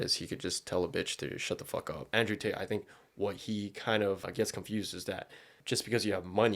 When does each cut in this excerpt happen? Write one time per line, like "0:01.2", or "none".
0:02.1
0:04.3
0:05.6

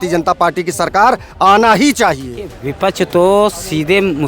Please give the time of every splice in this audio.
0:02.6

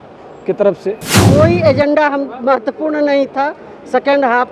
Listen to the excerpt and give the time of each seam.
0:01.1

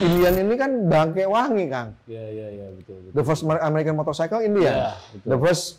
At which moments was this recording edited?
none

